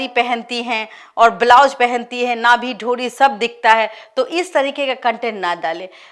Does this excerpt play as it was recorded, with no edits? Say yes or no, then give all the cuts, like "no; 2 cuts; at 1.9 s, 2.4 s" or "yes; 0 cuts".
yes; 0 cuts